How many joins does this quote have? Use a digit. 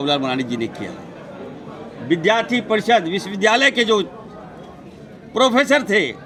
0